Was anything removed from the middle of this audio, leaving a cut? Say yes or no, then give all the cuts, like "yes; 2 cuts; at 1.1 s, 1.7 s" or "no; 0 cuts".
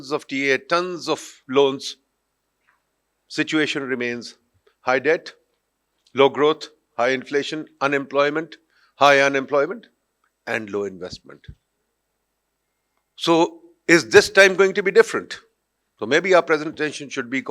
no; 0 cuts